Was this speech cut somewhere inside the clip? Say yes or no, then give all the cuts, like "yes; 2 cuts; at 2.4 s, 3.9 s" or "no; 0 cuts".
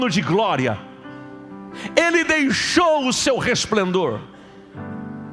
no; 0 cuts